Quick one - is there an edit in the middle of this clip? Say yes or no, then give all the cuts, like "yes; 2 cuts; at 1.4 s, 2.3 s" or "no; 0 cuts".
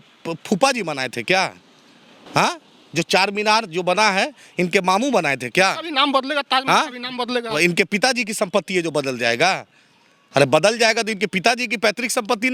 no; 0 cuts